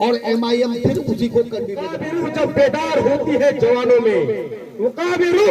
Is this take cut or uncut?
cut